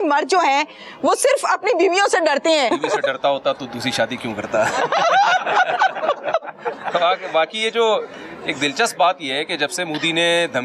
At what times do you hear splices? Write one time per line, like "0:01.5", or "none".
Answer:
0:02.7